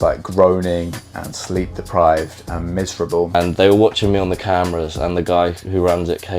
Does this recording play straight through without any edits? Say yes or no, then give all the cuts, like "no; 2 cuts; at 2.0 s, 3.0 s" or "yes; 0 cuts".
no; 1 cut; at 3.3 s